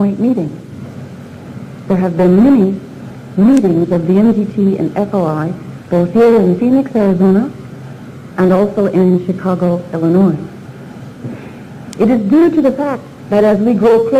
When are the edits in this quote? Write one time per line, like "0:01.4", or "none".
none